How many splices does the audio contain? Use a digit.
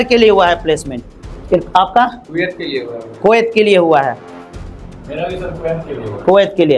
1